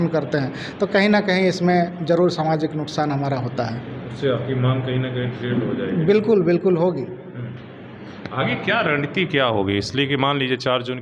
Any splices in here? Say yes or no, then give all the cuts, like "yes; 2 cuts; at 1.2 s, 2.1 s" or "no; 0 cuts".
no; 0 cuts